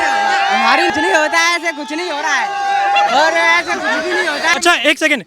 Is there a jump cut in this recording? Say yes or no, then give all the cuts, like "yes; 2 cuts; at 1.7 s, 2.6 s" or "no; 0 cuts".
yes; 2 cuts; at 0.9 s, 4.5 s